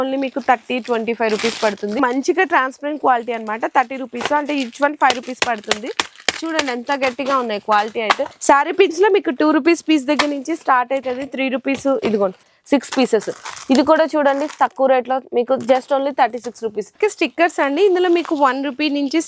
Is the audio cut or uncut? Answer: cut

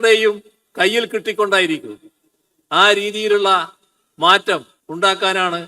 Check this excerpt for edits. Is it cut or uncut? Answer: cut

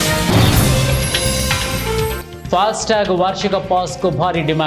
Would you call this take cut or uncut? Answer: cut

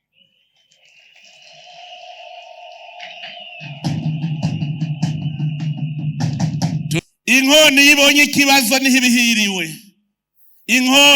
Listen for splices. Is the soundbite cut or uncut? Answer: cut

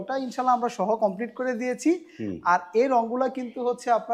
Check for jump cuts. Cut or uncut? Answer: uncut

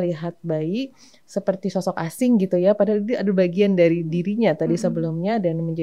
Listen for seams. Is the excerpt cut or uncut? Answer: uncut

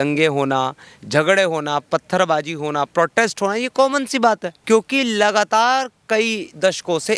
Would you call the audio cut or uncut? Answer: cut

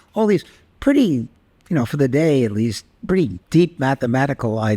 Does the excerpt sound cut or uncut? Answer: cut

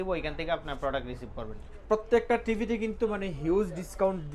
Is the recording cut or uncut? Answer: cut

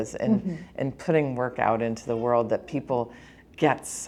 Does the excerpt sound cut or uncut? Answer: uncut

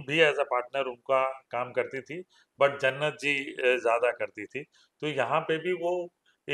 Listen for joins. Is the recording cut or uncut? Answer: uncut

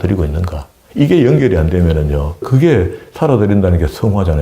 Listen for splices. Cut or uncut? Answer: cut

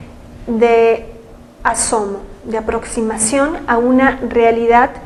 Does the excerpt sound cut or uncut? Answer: uncut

